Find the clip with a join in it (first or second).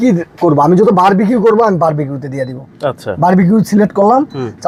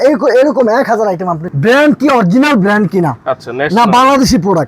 second